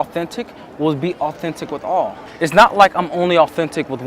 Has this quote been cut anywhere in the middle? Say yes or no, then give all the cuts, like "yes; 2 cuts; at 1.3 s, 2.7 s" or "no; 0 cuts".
yes; 1 cut; at 2.2 s